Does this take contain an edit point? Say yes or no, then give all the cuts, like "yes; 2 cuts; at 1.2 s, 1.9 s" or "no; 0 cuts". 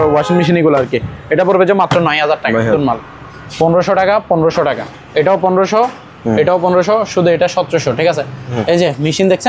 yes; 2 cuts; at 2.7 s, 8.6 s